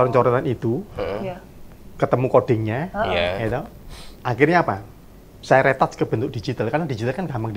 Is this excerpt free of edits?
yes; 0 cuts

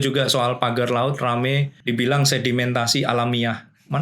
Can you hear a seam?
yes; 1 cut; at 1.7 s

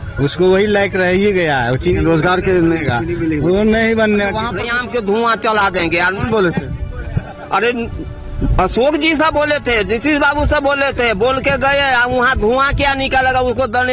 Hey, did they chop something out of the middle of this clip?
yes; 1 cut; at 4.6 s

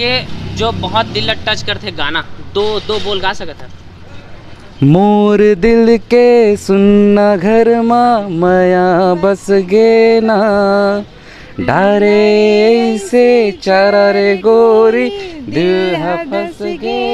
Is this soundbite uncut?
yes; 0 cuts

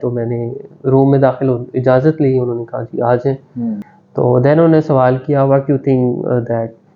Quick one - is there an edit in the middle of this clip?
yes; 1 cut; at 3.9 s

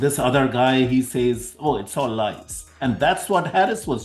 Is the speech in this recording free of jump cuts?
yes; 0 cuts

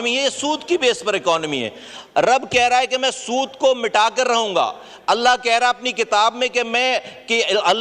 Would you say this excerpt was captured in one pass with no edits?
yes; 0 cuts

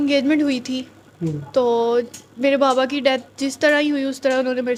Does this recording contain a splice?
no; 0 cuts

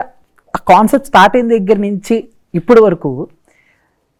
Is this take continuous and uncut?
yes; 0 cuts

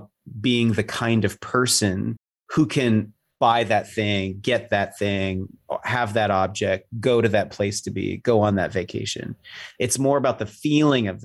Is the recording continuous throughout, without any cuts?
no; 1 cut; at 3.2 s

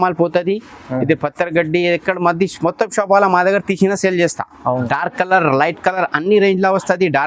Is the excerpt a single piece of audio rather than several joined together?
no; 1 cut; at 4.8 s

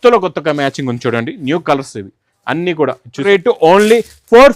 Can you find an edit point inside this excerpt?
yes; 1 cut; at 3.2 s

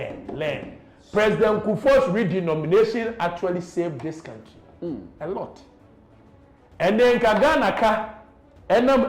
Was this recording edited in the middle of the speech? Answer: no; 0 cuts

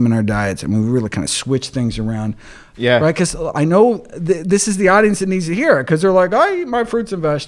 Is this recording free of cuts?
no; 1 cut; at 2.6 s

